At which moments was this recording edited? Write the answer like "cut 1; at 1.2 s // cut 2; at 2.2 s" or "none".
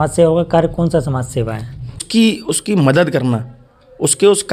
cut 1; at 2.0 s

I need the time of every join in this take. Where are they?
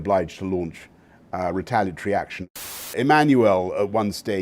cut 1; at 2.9 s

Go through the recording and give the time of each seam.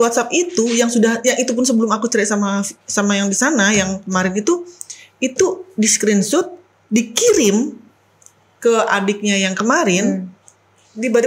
none

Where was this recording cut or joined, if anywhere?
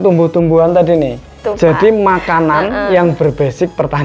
cut 1; at 1.4 s

